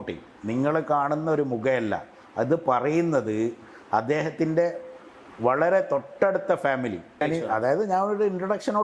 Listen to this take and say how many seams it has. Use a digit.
1